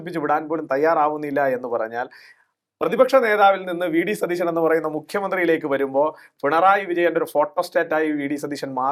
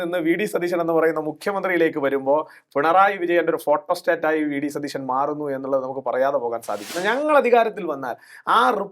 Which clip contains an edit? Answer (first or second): second